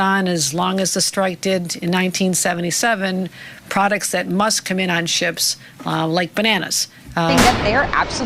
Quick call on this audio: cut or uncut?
cut